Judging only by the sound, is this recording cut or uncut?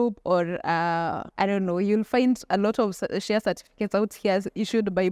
cut